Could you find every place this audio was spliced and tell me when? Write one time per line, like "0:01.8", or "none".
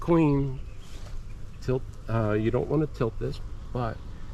none